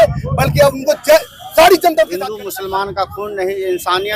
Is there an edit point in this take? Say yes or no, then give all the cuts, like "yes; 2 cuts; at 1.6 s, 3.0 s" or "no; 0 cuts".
yes; 1 cut; at 2.1 s